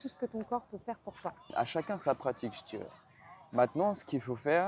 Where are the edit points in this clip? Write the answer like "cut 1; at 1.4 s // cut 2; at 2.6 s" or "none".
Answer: cut 1; at 1.5 s